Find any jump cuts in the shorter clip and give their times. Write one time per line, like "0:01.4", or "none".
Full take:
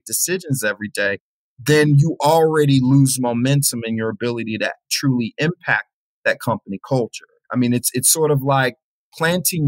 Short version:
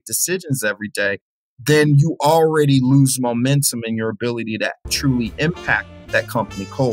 0:05.9